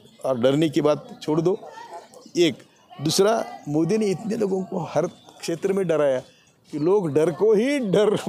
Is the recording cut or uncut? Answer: uncut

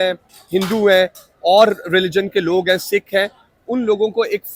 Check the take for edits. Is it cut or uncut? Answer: uncut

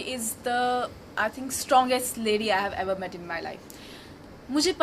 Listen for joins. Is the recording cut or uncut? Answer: uncut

